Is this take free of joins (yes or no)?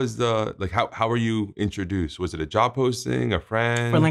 yes